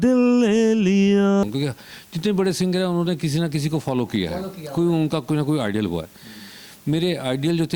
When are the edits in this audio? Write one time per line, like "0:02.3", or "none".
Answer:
0:01.4